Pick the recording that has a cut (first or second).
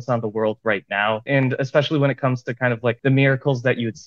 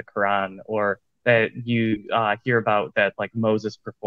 first